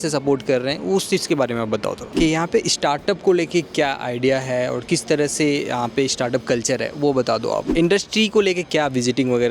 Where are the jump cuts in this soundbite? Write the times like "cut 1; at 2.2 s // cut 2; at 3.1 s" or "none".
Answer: cut 1; at 2.1 s // cut 2; at 7.7 s